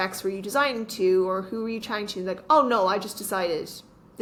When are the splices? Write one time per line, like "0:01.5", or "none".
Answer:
none